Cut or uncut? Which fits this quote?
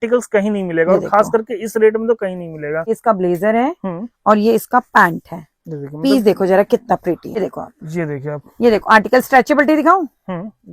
cut